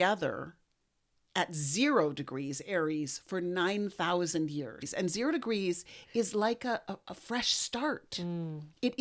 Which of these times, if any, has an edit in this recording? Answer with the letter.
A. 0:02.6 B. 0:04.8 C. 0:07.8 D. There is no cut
B